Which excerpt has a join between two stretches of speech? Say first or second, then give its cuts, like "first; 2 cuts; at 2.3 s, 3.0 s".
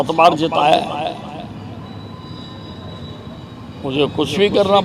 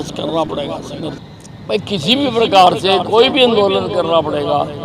second; 1 cut; at 1.2 s